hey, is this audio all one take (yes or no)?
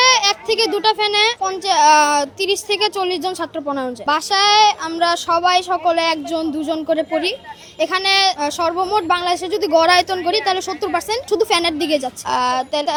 yes